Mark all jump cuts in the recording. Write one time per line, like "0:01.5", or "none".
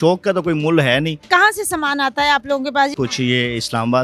0:01.3
0:02.9